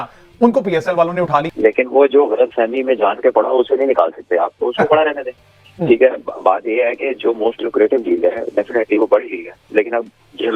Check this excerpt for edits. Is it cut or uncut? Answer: cut